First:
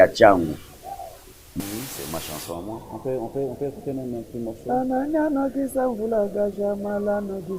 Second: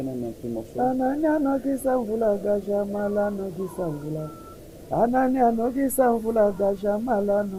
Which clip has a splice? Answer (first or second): first